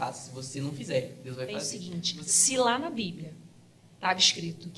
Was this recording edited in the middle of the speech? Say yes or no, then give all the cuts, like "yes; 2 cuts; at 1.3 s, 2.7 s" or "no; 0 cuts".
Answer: yes; 1 cut; at 1.8 s